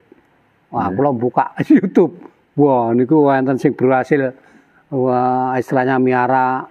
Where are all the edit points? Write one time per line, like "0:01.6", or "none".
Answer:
none